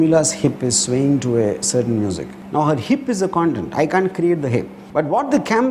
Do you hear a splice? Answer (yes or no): yes